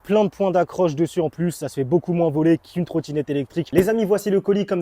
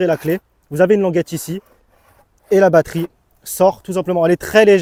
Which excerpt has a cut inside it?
first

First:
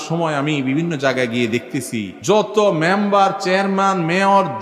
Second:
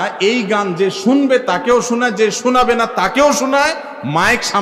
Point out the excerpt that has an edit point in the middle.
first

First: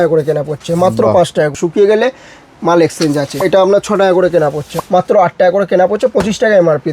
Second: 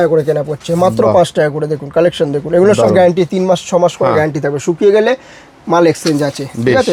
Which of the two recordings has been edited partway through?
first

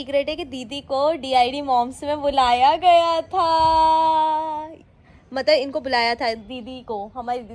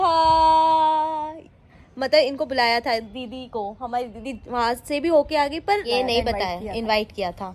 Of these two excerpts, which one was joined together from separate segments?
second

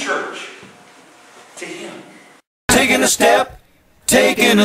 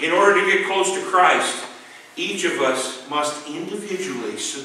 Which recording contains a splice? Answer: first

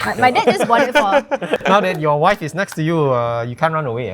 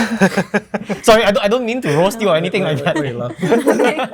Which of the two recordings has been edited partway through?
first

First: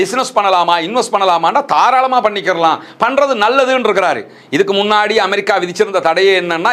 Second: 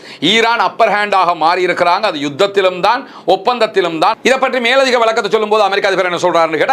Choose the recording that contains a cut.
second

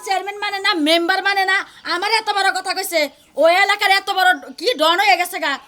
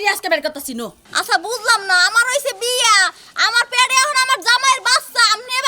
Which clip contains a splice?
second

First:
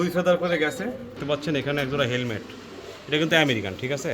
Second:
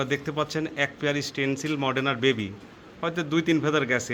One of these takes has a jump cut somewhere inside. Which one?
first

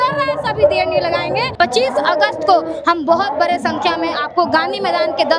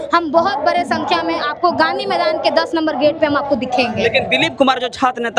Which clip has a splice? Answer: first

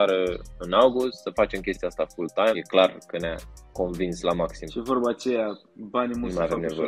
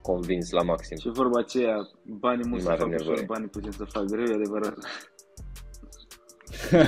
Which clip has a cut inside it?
first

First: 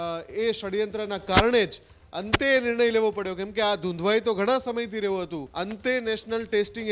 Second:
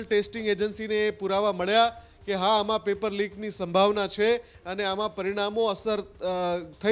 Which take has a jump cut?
first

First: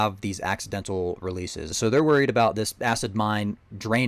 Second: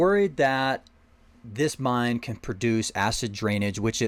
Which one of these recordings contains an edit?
first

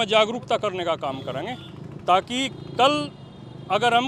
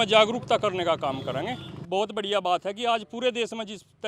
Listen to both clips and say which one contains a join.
second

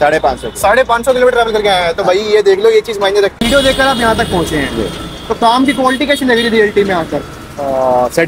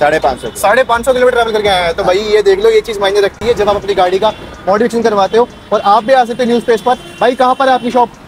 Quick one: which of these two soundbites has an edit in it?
first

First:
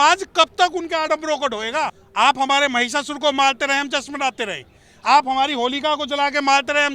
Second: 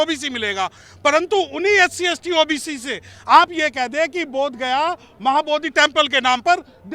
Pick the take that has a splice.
first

